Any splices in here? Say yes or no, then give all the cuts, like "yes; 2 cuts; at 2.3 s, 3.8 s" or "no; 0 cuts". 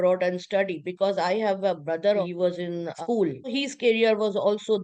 yes; 2 cuts; at 2.2 s, 3.5 s